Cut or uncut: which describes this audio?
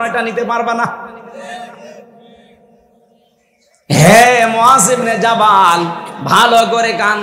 uncut